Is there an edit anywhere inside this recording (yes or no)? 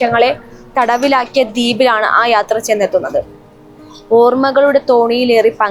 no